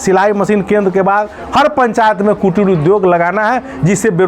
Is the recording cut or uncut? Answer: uncut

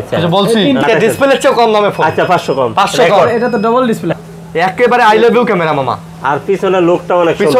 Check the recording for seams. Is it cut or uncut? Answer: cut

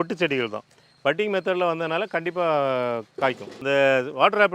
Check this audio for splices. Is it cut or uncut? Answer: cut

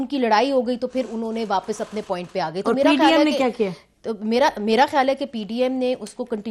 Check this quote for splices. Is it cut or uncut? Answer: uncut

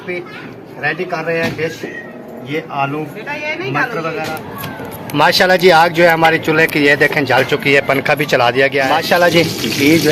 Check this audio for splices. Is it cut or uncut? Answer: cut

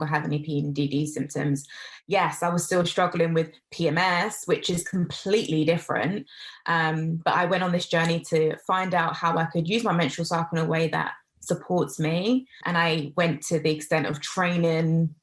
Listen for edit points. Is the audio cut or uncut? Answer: cut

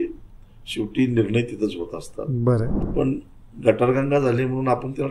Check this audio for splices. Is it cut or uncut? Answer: cut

